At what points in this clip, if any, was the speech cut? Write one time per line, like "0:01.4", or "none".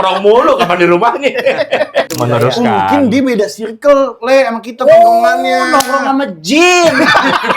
0:02.1